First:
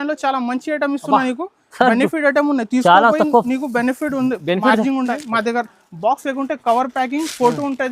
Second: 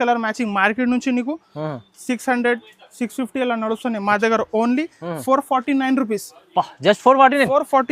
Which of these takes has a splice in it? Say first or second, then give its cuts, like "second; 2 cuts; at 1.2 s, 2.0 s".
first; 1 cut; at 5.2 s